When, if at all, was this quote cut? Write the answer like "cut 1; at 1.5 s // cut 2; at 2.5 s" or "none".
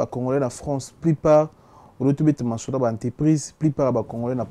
none